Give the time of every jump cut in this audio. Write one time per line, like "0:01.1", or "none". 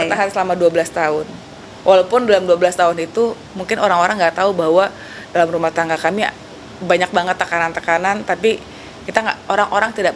none